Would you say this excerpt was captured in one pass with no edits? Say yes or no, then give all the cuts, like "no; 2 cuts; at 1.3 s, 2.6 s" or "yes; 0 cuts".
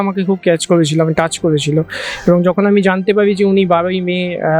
yes; 0 cuts